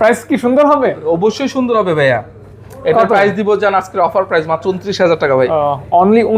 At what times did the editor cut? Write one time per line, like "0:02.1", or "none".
none